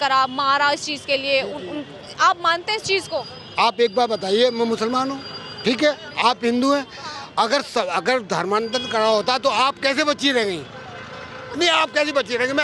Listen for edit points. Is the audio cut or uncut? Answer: uncut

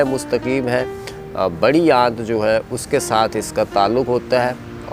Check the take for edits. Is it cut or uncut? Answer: uncut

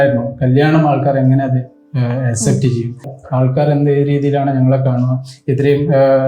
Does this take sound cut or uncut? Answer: cut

